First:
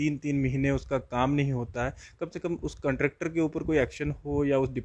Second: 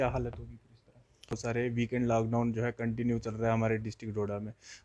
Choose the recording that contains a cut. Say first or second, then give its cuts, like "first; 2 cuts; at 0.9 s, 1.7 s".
second; 1 cut; at 1.4 s